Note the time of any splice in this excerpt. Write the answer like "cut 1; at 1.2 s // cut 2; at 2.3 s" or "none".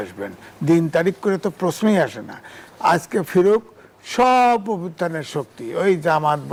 none